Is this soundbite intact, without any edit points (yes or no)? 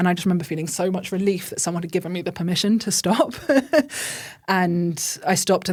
yes